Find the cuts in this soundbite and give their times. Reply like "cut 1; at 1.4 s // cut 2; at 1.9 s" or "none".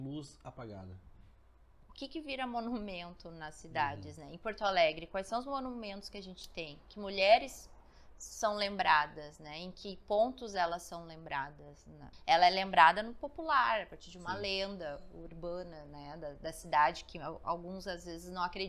cut 1; at 1.7 s // cut 2; at 12.0 s